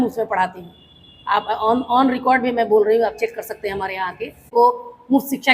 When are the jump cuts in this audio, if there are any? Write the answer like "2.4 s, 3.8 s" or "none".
4.5 s